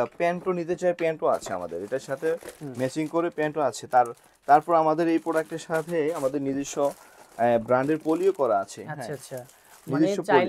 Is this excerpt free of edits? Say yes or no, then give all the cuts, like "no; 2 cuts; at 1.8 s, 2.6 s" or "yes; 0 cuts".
yes; 0 cuts